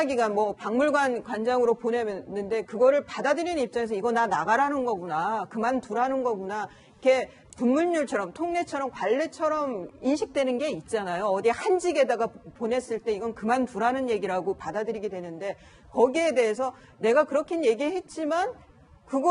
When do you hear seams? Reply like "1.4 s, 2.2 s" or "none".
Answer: 8.3 s